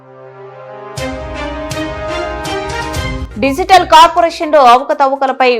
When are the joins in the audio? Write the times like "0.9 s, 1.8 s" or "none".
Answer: 2.6 s